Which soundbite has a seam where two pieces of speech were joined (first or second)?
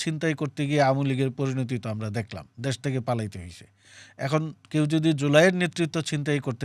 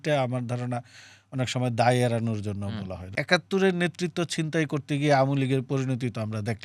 second